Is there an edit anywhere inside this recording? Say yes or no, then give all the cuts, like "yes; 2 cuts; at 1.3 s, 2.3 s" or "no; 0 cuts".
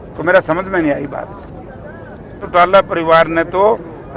yes; 1 cut; at 2.4 s